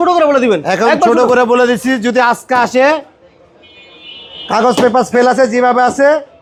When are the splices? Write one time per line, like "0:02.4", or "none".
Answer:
none